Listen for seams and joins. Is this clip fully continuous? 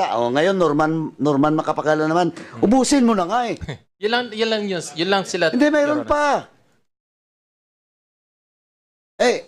yes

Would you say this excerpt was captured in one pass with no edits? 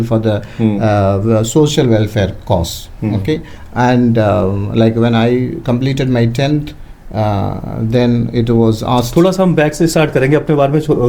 yes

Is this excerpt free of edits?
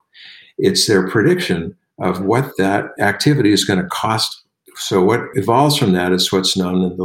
yes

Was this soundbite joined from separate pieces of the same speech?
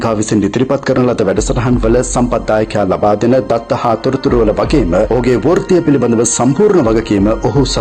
no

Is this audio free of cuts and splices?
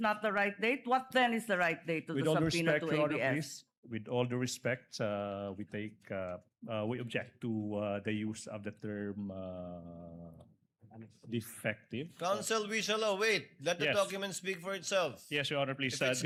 yes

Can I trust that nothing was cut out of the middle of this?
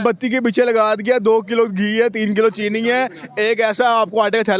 yes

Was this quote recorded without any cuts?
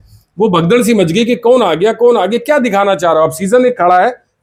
yes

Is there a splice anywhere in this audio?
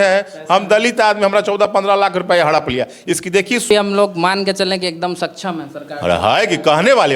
yes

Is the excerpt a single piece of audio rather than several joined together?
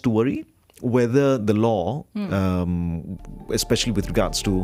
yes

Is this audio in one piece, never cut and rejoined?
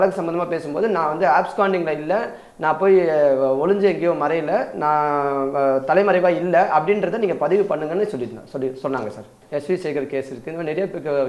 no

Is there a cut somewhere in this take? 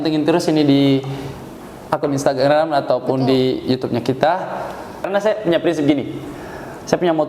yes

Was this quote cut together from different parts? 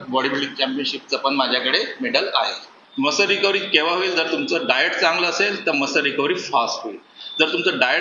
yes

